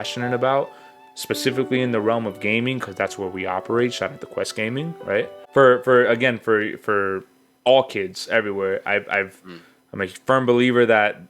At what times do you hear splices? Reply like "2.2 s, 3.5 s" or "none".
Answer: 5.4 s